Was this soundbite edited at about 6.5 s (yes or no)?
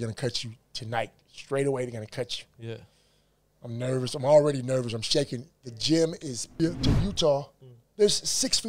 yes